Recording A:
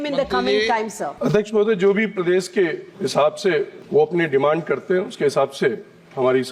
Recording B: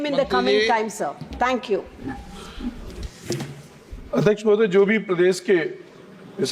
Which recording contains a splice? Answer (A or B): A